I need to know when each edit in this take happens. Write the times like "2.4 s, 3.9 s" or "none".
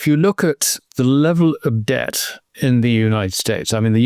2.5 s